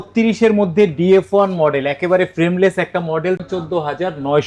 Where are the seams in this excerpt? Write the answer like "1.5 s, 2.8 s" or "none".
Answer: 3.4 s